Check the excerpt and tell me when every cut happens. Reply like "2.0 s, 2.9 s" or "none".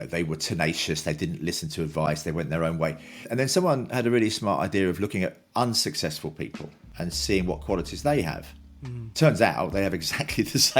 3.3 s